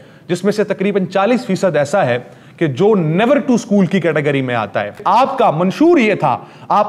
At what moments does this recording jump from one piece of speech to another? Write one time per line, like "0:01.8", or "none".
0:05.0